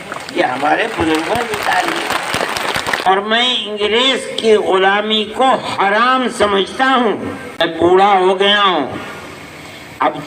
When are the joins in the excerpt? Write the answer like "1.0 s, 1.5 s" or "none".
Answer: 3.1 s, 7.6 s